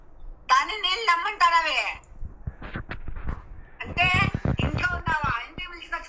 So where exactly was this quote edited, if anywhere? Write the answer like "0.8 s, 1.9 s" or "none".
none